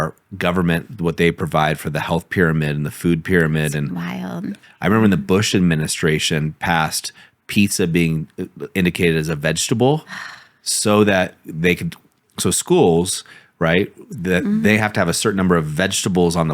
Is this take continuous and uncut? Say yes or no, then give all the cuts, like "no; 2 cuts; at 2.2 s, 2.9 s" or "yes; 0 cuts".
no; 1 cut; at 4.5 s